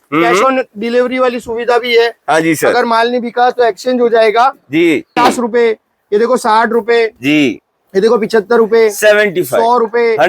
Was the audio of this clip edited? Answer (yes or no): yes